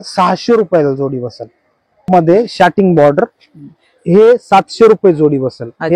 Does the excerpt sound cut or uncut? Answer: cut